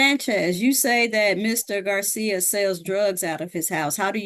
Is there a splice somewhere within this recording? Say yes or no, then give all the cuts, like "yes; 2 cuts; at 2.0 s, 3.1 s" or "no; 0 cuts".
no; 0 cuts